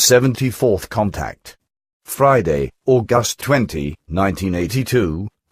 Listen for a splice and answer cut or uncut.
uncut